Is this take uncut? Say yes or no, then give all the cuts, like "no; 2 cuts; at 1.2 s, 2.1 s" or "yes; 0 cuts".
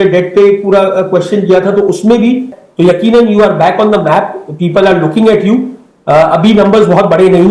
no; 1 cut; at 2.6 s